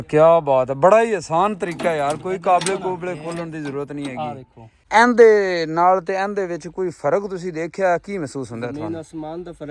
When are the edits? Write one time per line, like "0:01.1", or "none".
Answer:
0:04.8